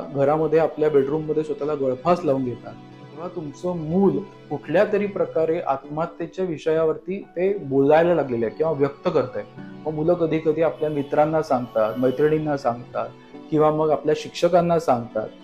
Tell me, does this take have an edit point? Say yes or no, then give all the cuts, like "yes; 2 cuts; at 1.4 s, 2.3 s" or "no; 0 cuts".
yes; 1 cut; at 3.2 s